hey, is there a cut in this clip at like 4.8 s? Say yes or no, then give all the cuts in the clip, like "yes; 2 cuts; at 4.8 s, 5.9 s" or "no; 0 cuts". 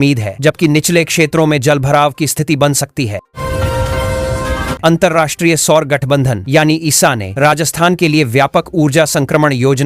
yes; 2 cuts; at 3.3 s, 4.8 s